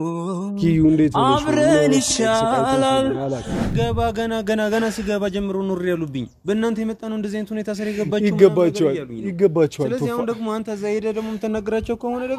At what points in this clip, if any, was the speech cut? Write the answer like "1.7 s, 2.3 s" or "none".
3.6 s